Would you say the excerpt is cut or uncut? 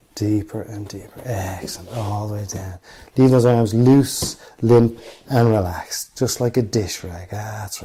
uncut